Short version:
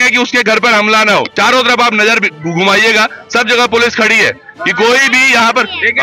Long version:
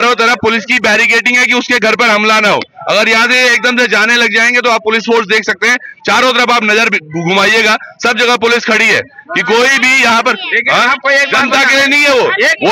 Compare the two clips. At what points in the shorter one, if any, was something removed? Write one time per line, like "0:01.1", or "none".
0:01.3